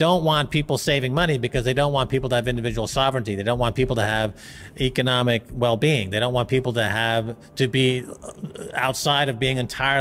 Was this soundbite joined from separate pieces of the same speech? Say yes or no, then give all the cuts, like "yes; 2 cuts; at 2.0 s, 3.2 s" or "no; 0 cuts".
no; 0 cuts